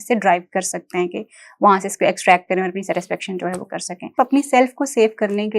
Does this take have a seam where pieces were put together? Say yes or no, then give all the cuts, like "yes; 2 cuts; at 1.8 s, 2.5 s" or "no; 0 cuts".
yes; 1 cut; at 4.1 s